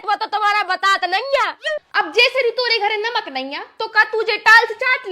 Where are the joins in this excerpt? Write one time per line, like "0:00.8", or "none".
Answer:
0:01.8